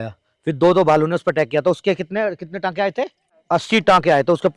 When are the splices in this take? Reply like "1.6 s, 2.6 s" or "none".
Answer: 3.3 s